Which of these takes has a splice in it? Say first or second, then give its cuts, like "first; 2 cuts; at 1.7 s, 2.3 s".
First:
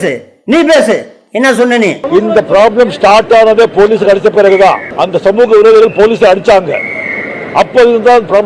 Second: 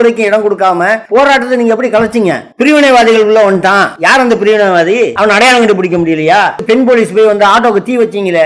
second; 5 cuts; at 1.0 s, 2.5 s, 3.9 s, 5.1 s, 6.6 s